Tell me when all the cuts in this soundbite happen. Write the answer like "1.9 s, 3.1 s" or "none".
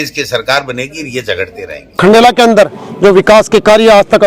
2.0 s